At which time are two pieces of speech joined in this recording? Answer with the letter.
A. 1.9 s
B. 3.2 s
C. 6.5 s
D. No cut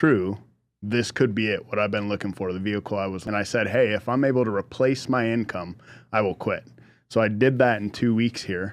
B